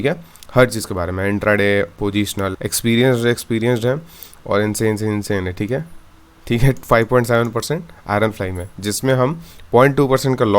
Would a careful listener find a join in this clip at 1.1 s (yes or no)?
no